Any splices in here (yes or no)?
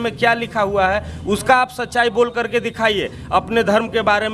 no